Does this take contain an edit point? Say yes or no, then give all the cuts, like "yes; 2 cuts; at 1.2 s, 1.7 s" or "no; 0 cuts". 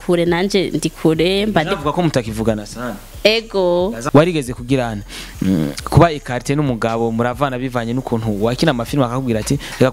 yes; 2 cuts; at 3.0 s, 4.0 s